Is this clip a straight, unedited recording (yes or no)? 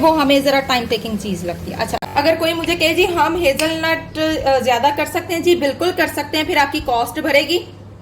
no